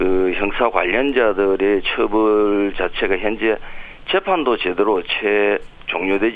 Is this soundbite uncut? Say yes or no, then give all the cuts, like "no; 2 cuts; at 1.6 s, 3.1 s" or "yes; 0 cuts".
no; 1 cut; at 2.6 s